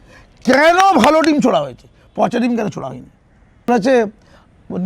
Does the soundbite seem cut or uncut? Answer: cut